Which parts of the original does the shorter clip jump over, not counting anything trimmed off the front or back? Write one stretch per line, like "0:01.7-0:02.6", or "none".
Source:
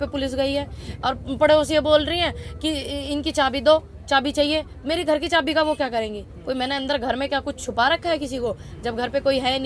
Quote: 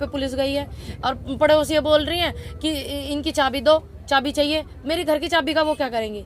none